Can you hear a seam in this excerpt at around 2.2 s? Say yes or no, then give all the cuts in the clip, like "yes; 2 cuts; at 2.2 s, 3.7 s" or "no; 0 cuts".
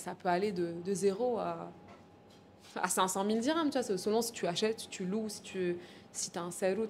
no; 0 cuts